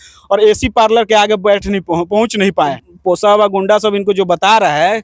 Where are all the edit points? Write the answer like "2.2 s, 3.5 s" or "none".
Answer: 2.9 s